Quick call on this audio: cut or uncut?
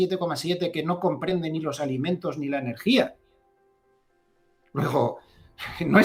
uncut